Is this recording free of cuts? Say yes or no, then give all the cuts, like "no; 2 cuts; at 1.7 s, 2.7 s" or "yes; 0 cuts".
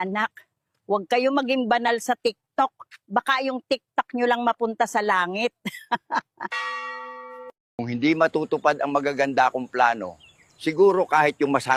yes; 0 cuts